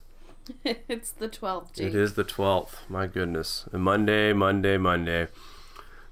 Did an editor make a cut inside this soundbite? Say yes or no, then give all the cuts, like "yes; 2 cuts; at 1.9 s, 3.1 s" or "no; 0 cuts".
no; 0 cuts